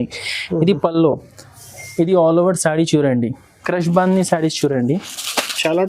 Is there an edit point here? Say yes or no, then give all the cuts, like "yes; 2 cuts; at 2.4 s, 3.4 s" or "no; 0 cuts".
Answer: yes; 1 cut; at 3.6 s